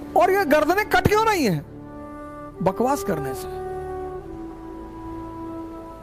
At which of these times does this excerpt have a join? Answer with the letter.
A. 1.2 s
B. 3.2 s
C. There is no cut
C